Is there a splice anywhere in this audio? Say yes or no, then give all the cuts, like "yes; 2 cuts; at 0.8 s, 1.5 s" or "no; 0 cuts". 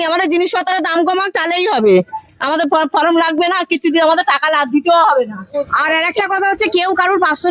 yes; 1 cut; at 5.7 s